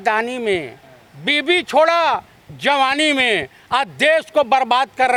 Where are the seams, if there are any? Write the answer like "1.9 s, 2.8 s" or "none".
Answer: none